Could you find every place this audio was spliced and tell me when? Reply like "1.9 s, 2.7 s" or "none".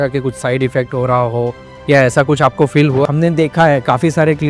3.1 s